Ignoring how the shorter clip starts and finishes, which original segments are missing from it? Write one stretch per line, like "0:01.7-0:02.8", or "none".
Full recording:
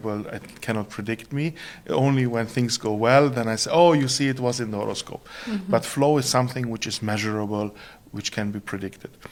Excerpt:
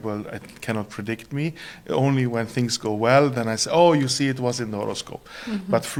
none